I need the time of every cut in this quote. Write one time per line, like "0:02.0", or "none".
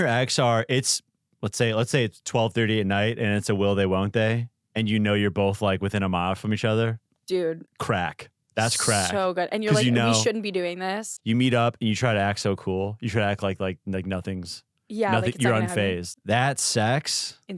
0:07.7
0:11.2
0:16.1